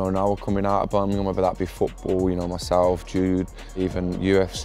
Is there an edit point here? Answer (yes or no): no